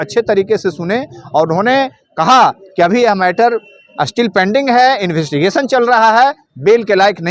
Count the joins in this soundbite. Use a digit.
0